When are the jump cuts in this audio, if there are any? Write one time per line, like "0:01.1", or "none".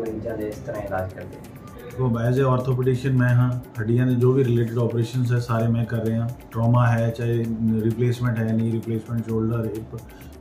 0:02.0